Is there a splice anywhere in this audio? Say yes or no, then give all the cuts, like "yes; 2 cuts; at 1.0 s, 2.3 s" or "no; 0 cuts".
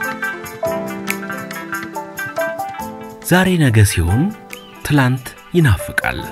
no; 0 cuts